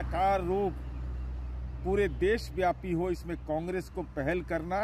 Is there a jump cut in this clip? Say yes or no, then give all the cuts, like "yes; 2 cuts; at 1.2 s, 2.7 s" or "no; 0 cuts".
no; 0 cuts